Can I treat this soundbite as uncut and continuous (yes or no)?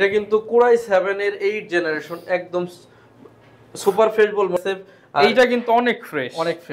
no